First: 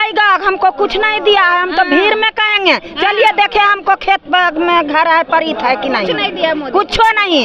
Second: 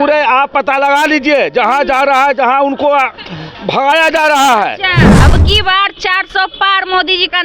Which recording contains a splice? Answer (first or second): second